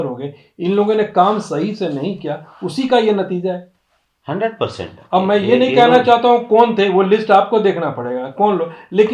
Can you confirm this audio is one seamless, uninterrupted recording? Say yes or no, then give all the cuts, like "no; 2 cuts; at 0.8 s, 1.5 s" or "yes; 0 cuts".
yes; 0 cuts